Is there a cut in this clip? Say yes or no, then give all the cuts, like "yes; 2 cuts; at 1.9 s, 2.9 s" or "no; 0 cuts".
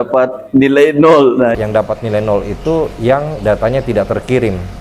yes; 1 cut; at 1.5 s